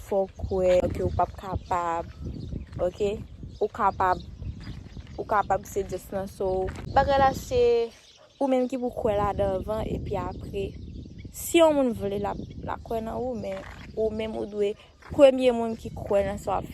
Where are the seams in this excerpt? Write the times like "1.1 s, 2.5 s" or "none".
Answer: 0.8 s, 6.9 s